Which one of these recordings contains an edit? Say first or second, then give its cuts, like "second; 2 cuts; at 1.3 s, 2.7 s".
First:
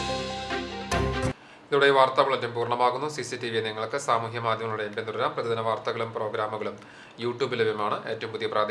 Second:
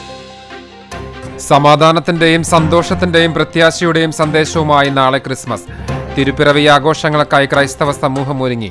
second; 1 cut; at 1.3 s